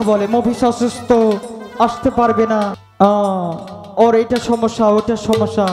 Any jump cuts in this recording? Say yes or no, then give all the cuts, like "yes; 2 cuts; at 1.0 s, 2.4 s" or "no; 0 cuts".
yes; 1 cut; at 2.8 s